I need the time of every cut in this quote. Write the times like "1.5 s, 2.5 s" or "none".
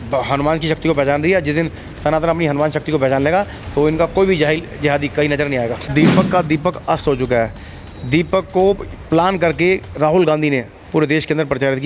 5.8 s